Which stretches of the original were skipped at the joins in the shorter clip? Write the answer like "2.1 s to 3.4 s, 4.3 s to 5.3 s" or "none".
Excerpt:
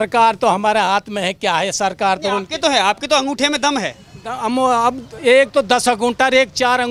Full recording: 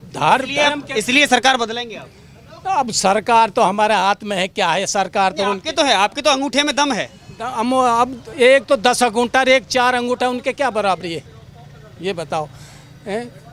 none